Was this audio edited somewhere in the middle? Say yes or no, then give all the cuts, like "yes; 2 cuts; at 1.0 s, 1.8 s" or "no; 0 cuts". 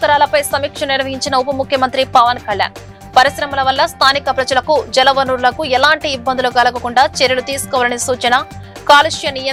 no; 0 cuts